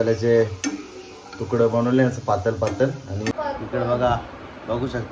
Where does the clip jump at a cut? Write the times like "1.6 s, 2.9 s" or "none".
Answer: 3.3 s

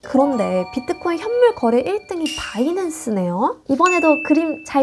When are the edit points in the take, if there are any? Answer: none

